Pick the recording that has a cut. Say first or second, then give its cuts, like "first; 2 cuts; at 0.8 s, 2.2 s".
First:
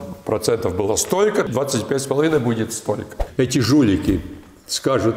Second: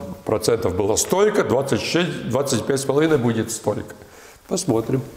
first; 2 cuts; at 1.5 s, 3.2 s